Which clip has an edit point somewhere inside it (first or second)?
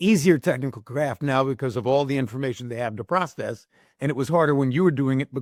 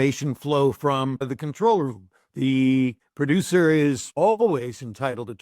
second